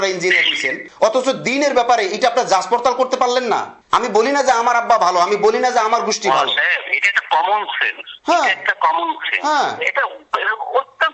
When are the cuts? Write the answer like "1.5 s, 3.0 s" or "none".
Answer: none